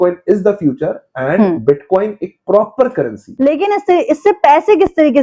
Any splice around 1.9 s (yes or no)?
no